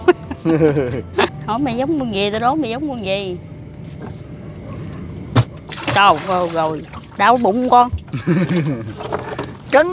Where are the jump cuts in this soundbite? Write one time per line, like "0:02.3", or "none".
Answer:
0:01.4